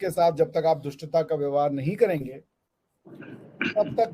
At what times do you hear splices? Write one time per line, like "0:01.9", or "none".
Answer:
none